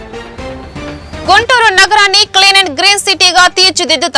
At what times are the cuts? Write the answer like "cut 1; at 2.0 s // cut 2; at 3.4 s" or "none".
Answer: cut 1; at 1.2 s